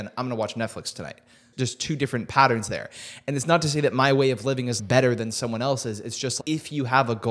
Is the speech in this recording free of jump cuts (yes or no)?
no